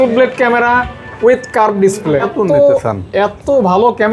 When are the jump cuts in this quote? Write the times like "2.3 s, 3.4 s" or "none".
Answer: 2.3 s

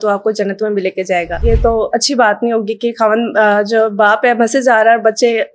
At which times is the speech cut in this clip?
1.4 s

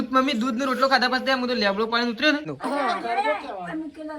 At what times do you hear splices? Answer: 2.5 s

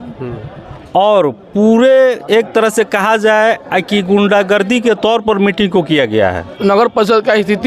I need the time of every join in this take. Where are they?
6.5 s

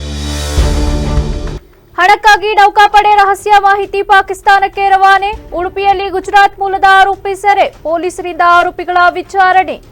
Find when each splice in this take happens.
none

